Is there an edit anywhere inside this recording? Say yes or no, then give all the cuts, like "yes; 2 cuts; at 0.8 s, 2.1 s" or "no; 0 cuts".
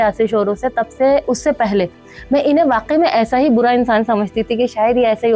no; 0 cuts